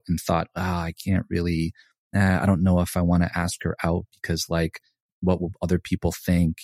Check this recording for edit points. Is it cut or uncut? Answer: uncut